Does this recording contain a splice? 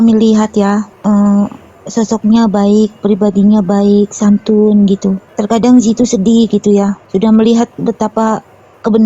yes; 3 cuts; at 0.9 s, 5.3 s, 7.0 s

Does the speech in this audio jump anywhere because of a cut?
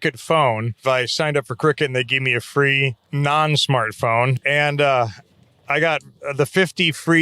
yes; 3 cuts; at 0.8 s, 3.0 s, 4.4 s

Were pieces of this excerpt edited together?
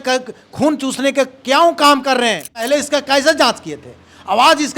yes; 1 cut; at 2.7 s

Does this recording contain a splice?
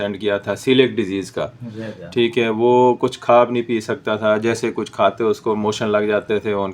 no; 0 cuts

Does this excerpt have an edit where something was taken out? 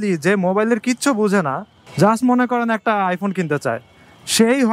no; 0 cuts

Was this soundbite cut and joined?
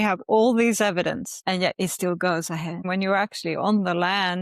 yes; 2 cuts; at 1.3 s, 2.8 s

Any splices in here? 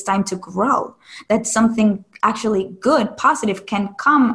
no; 0 cuts

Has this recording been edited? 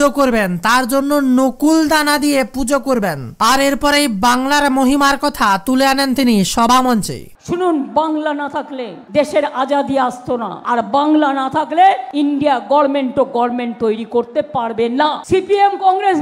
no; 0 cuts

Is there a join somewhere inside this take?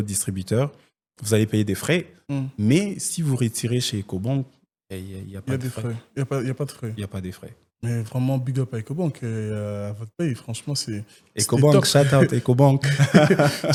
no; 0 cuts

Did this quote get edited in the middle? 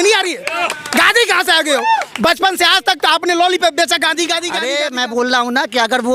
yes; 1 cut; at 4.5 s

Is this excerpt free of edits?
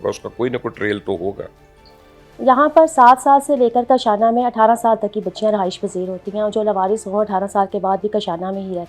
yes; 0 cuts

